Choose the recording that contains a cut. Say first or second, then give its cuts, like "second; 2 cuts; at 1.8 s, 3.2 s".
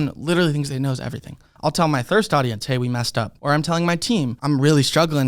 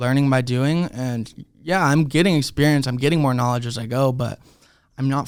first; 3 cuts; at 1.5 s, 3.3 s, 4.4 s